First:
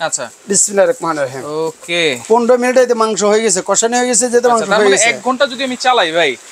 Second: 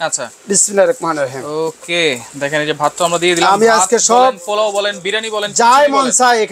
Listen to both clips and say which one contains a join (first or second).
first